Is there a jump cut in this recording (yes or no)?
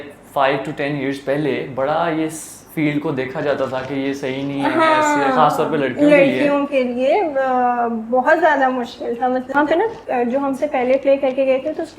yes